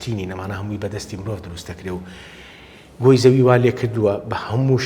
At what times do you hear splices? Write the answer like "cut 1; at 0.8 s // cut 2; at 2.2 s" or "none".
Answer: none